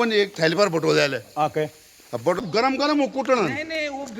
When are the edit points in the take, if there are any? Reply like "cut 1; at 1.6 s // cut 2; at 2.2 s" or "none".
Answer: cut 1; at 2.4 s

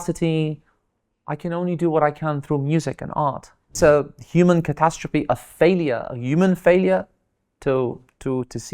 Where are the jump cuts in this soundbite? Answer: cut 1; at 3.7 s

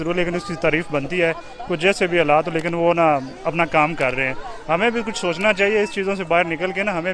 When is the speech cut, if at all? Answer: none

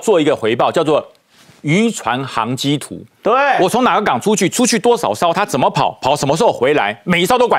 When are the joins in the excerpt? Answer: none

